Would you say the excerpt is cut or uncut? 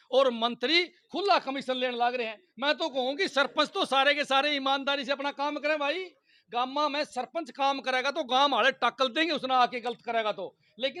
uncut